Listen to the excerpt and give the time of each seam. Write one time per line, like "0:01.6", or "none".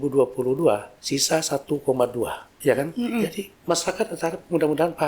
0:00.9
0:02.5
0:03.5